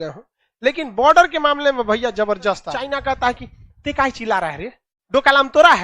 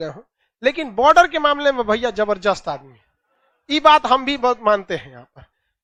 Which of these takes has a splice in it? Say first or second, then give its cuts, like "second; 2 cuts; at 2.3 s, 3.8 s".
first; 1 cut; at 3.0 s